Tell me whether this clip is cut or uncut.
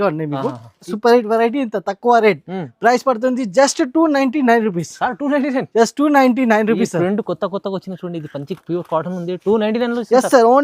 cut